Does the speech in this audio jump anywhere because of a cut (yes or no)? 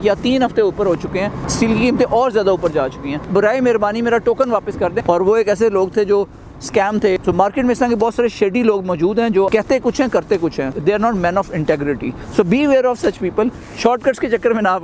yes